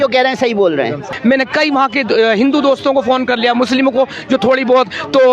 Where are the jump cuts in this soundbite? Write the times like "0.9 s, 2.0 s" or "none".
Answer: 1.1 s